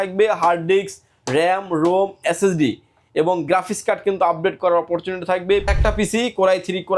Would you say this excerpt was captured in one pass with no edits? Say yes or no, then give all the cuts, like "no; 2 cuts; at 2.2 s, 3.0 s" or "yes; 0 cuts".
no; 1 cut; at 5.7 s